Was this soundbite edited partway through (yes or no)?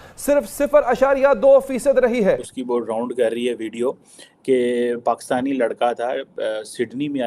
yes